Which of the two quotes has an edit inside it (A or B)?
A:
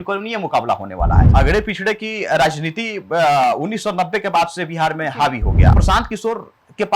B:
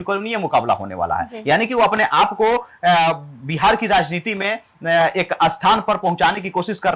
A